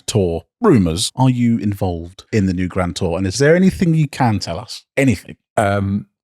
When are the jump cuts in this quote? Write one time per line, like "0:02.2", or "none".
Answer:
0:01.0
0:02.1
0:03.4